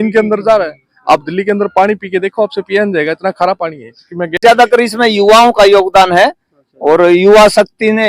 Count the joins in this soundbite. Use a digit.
1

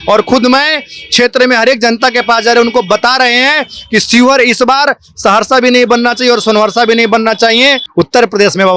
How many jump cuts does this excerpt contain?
1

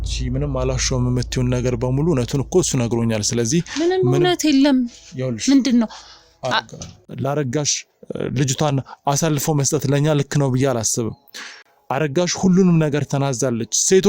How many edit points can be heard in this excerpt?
1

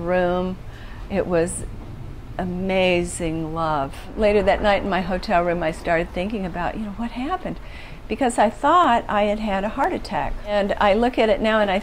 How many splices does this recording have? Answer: 2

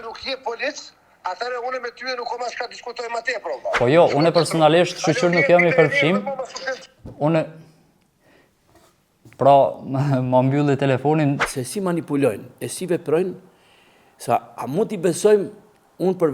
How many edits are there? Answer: 2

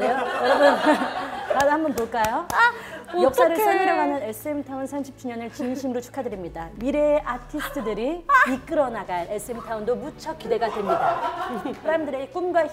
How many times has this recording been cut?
1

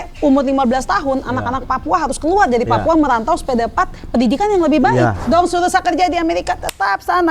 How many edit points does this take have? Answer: 1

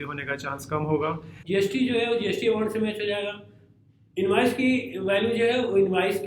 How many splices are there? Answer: 1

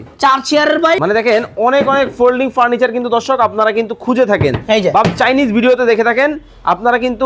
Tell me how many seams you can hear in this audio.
1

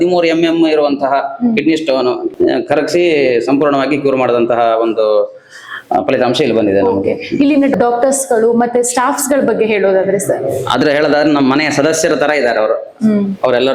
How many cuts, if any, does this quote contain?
0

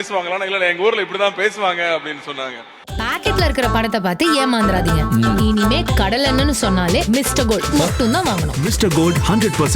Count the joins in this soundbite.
1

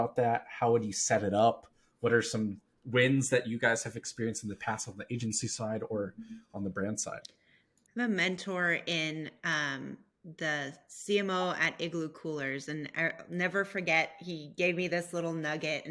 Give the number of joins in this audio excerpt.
0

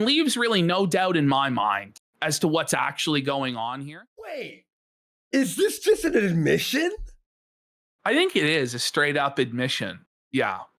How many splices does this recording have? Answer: 1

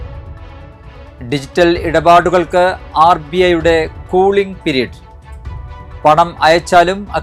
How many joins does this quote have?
0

